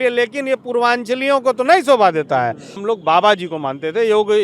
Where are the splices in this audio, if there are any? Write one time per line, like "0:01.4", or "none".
0:02.8